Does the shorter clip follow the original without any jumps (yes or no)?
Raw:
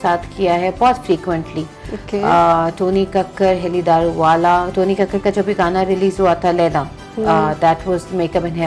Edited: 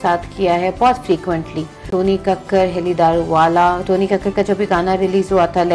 no